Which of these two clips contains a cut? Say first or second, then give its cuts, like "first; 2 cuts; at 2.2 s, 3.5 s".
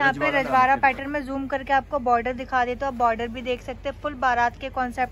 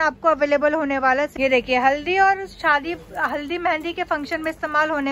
second; 1 cut; at 1.3 s